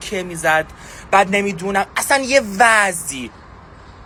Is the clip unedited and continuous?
yes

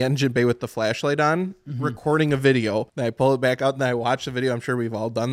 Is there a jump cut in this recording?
yes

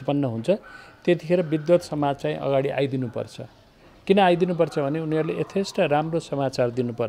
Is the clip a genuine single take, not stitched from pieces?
yes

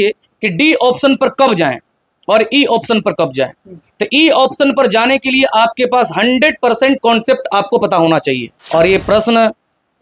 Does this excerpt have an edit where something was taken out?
yes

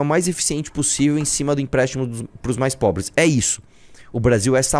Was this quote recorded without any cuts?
yes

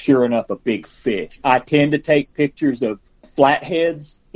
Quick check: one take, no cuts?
no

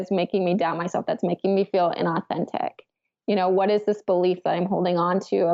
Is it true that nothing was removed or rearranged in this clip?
yes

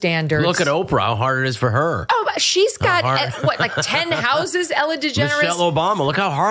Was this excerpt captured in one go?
yes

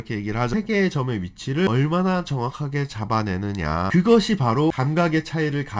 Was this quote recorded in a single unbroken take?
no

